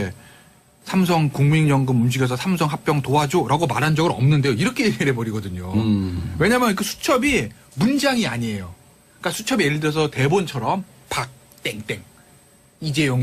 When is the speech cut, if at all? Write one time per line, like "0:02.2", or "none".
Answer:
0:08.2